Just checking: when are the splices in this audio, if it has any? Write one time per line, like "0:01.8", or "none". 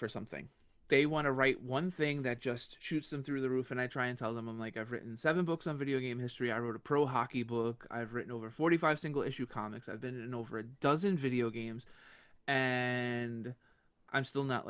none